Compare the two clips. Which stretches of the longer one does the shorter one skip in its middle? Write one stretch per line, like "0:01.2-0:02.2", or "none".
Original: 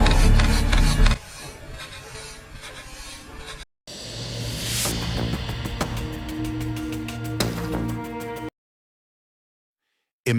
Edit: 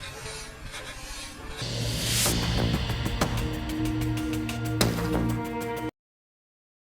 0:03.5-0:04.2